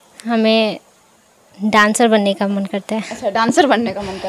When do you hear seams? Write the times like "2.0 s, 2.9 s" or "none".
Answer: none